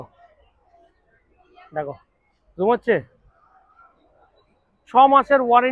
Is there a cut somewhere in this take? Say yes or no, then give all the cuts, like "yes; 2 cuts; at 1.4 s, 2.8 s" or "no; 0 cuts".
no; 0 cuts